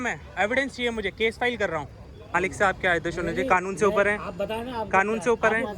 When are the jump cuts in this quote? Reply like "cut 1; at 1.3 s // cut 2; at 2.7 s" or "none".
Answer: cut 1; at 2.3 s